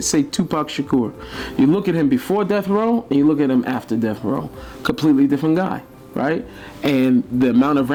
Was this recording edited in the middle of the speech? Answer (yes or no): no